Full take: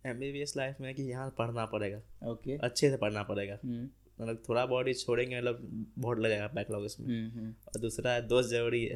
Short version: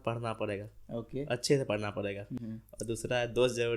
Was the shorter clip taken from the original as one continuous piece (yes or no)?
no